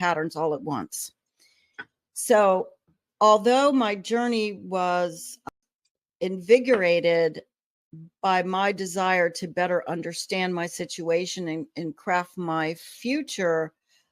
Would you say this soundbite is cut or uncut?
cut